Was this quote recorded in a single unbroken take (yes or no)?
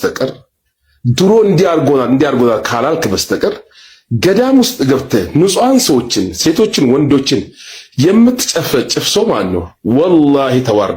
yes